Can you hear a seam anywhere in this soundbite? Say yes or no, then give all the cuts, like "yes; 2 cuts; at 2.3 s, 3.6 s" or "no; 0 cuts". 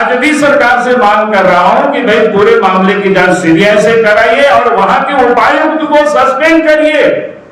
no; 0 cuts